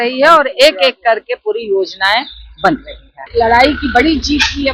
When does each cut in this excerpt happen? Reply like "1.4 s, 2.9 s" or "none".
3.2 s